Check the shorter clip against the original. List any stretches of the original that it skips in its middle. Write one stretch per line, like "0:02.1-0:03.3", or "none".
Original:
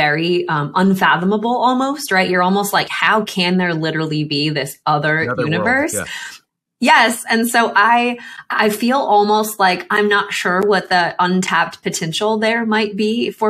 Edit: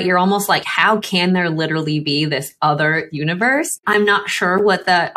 0:06.0-0:09.8